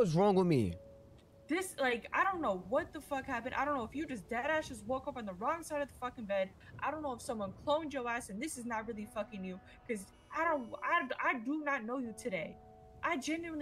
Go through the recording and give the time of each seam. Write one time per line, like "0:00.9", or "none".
none